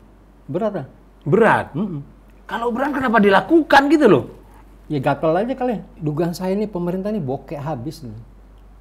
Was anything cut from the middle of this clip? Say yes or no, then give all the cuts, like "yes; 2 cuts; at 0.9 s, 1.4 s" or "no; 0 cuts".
yes; 1 cut; at 5.9 s